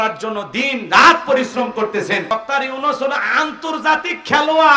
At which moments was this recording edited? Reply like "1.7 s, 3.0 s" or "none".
2.3 s